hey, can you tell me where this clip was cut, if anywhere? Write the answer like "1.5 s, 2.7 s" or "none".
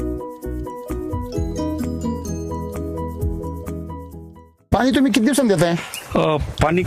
4.7 s